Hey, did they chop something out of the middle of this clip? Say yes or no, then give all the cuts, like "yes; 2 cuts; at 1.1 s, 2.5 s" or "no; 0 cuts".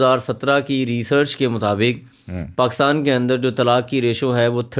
no; 0 cuts